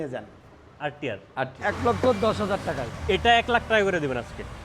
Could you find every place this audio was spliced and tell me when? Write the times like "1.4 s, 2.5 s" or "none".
1.6 s